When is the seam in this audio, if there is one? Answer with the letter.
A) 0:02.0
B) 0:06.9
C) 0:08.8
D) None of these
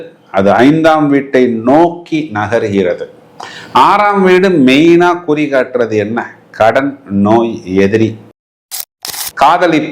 C